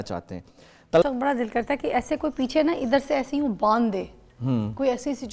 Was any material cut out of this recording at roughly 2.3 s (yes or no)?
no